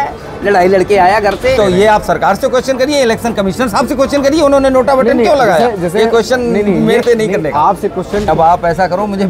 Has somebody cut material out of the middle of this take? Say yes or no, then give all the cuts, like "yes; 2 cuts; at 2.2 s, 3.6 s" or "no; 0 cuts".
yes; 2 cuts; at 1.6 s, 8.3 s